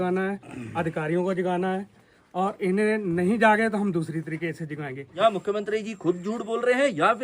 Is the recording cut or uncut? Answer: cut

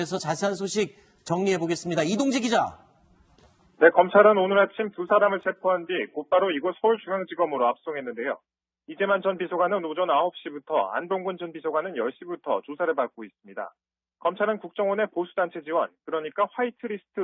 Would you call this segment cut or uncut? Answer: uncut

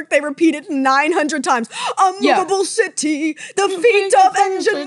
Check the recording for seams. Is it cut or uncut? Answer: uncut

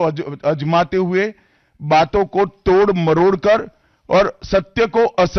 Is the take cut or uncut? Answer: uncut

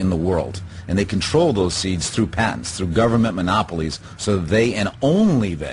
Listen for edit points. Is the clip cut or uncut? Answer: uncut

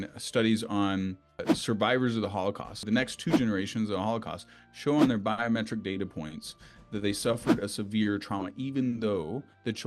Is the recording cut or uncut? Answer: cut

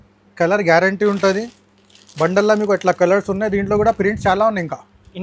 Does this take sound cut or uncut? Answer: uncut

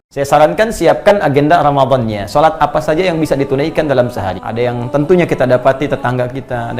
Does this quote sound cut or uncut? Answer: cut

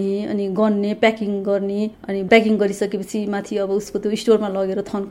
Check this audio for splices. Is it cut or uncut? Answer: uncut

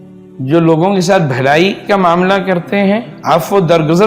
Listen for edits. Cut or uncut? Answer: cut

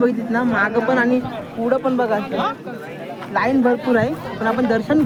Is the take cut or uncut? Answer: uncut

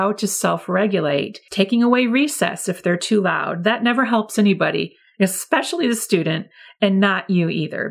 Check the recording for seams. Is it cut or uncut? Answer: cut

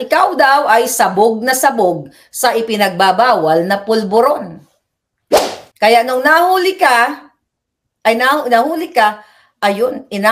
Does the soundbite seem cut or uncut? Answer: uncut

